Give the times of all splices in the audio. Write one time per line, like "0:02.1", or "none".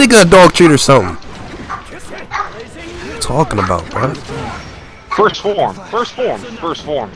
none